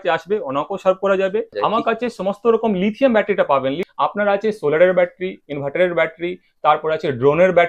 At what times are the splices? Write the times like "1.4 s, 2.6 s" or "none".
1.5 s, 3.8 s